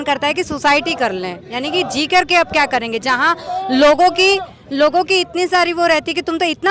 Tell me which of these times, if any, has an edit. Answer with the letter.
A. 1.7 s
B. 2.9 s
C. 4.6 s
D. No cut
D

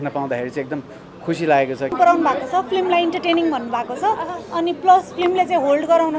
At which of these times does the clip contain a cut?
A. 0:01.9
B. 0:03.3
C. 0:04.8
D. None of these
A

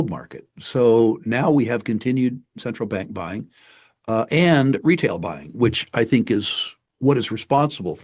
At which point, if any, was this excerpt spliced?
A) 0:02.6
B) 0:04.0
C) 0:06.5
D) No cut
D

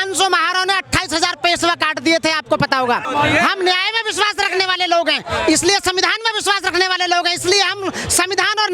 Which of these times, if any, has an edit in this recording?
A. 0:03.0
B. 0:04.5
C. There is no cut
A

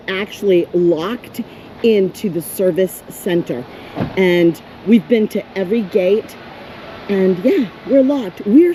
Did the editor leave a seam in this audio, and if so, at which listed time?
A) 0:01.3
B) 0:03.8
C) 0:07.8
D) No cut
D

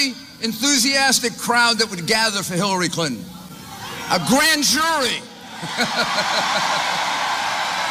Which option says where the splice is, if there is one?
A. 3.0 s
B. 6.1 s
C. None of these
C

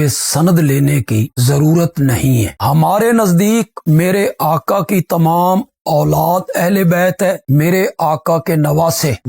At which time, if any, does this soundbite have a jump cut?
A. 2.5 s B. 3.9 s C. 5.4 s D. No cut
A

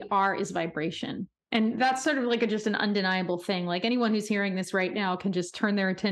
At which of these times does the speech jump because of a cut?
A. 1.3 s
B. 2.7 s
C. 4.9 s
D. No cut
A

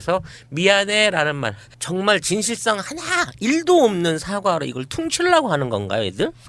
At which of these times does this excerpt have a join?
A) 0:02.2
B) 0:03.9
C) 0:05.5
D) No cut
B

